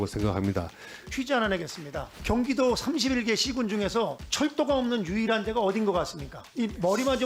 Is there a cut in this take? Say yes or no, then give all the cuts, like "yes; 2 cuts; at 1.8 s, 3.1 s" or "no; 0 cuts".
yes; 1 cut; at 1.1 s